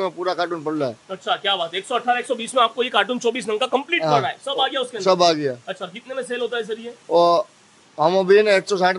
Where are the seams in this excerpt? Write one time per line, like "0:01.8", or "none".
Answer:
none